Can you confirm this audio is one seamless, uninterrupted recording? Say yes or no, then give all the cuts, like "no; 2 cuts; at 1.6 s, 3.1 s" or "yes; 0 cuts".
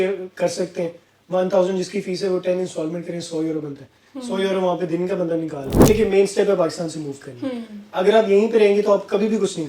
no; 1 cut; at 5.7 s